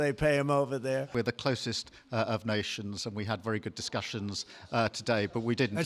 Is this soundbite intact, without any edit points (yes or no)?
no